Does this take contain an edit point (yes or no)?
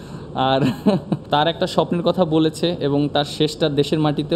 yes